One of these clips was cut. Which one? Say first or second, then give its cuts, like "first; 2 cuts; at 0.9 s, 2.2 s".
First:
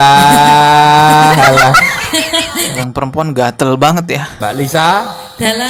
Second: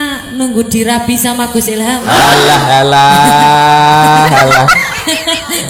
first; 1 cut; at 4.4 s